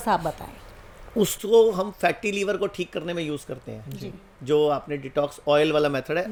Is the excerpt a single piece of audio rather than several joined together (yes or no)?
yes